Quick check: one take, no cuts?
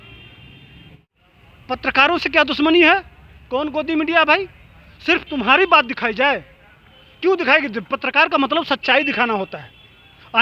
no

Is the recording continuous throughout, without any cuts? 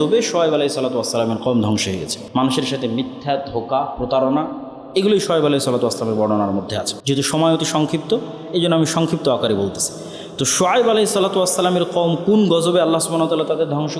no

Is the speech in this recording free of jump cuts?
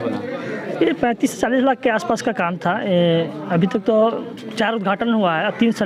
yes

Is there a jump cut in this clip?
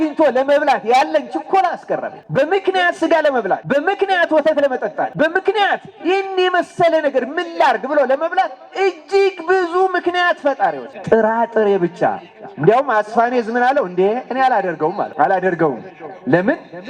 yes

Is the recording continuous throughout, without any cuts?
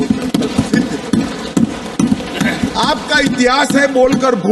yes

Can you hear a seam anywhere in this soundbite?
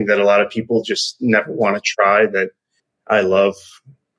no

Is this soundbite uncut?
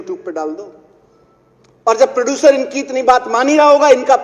yes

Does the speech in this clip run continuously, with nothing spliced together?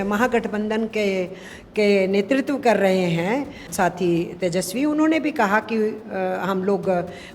no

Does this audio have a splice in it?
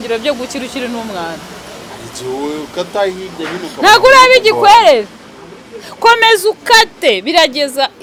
no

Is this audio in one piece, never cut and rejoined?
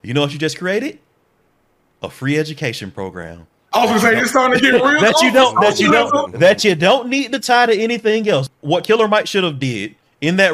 no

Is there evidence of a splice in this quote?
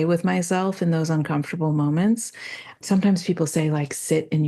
yes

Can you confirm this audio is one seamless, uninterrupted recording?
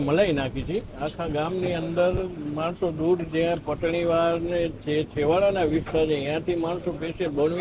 yes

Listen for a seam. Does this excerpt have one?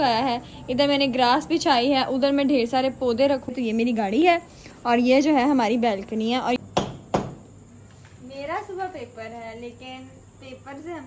yes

